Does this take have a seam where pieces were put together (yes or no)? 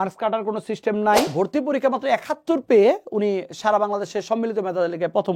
yes